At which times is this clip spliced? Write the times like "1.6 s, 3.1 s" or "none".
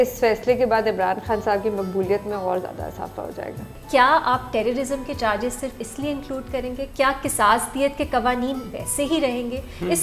3.8 s